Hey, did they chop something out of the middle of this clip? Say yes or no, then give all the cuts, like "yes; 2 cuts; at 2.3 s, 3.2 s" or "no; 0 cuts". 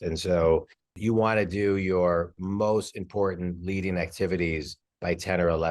yes; 1 cut; at 0.9 s